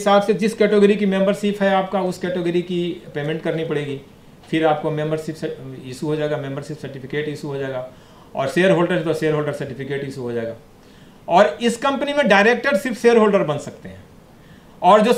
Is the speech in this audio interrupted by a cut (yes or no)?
no